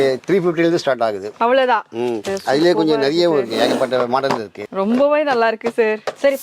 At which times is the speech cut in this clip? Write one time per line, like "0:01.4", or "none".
none